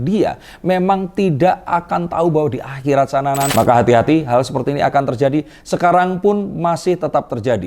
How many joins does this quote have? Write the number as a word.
one